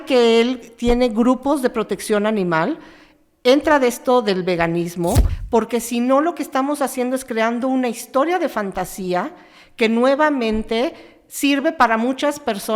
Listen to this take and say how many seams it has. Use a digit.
1